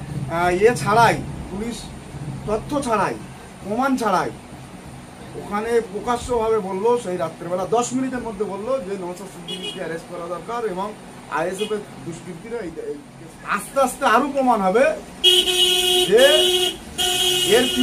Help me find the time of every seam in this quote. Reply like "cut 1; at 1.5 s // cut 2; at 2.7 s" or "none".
cut 1; at 13.2 s